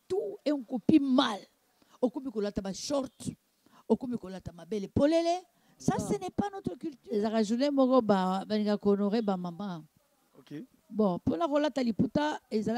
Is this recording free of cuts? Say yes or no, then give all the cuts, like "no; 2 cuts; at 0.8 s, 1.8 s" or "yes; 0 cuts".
no; 1 cut; at 6.9 s